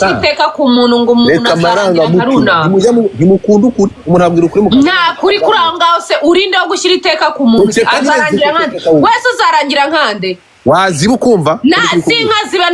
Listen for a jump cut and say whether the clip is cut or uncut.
uncut